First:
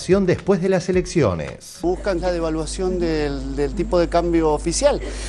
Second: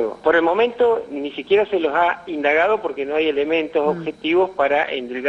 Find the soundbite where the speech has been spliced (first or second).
first